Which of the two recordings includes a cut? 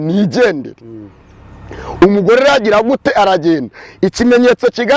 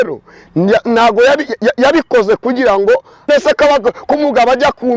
second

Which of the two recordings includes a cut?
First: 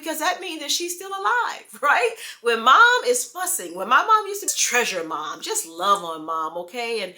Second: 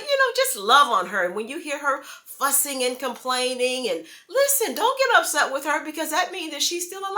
first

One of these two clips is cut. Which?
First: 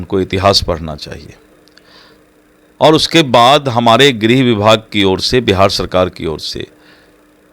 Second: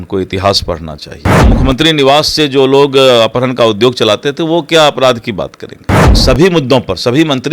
second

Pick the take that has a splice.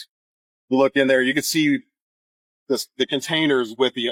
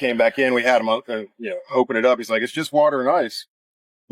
second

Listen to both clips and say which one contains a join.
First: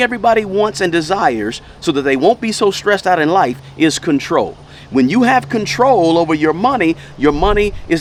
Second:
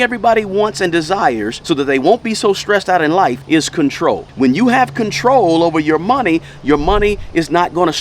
second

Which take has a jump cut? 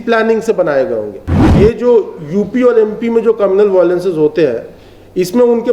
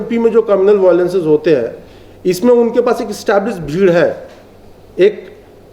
first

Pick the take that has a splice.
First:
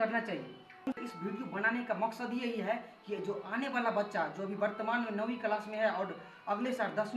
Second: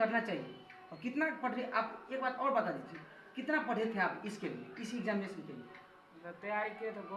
first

